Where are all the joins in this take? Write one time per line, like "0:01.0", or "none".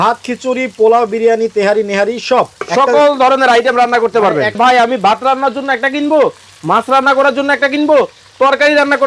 0:04.6